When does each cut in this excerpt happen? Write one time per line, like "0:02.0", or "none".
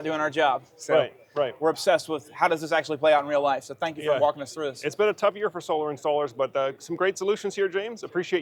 none